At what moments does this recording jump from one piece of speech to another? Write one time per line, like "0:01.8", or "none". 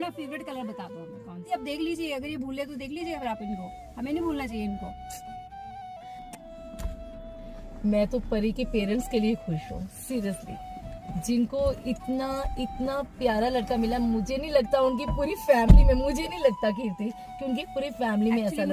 0:01.5